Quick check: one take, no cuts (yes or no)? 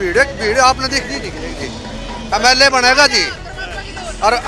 no